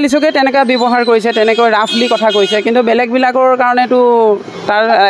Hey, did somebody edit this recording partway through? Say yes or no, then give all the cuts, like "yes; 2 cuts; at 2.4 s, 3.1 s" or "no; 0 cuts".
no; 0 cuts